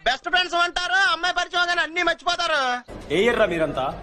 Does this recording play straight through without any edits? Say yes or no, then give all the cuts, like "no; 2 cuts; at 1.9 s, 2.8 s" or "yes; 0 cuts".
yes; 0 cuts